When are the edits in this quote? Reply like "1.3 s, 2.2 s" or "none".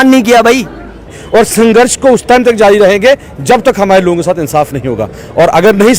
1.1 s